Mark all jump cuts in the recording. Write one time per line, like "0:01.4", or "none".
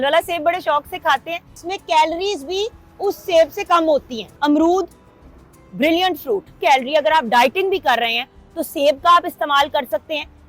0:01.5
0:04.2
0:06.6

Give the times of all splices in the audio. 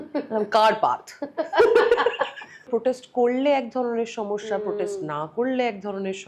0:02.7

